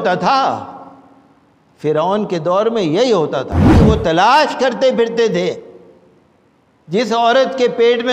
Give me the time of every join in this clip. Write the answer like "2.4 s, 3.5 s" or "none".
3.8 s